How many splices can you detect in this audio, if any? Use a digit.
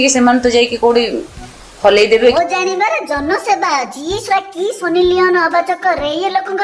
1